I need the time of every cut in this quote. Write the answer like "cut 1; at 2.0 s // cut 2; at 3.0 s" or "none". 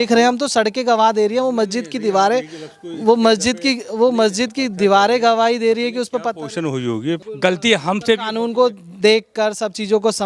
cut 1; at 7.2 s